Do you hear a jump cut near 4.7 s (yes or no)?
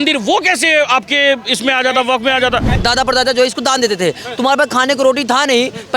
no